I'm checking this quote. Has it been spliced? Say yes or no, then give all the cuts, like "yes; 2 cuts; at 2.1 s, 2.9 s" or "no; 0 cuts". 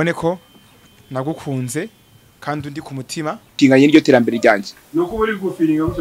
yes; 1 cut; at 3.6 s